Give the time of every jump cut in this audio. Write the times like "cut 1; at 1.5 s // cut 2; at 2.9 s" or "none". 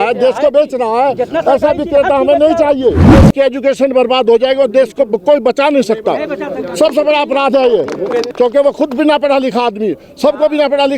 cut 1; at 3.2 s // cut 2; at 8.3 s